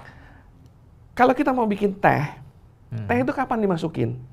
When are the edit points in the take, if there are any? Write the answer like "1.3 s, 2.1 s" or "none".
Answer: none